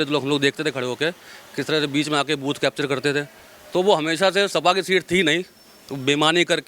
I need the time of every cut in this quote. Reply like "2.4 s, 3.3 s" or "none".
none